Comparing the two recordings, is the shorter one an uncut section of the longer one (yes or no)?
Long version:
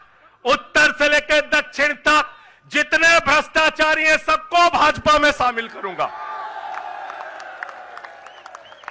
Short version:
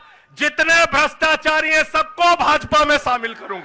yes